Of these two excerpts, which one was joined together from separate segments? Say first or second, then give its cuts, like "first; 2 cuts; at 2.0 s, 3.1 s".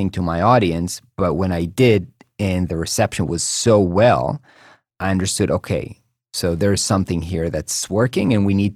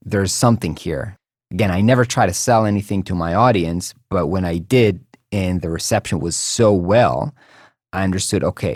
second; 1 cut; at 1.1 s